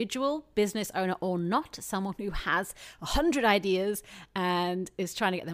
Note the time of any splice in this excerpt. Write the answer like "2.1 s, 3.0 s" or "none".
none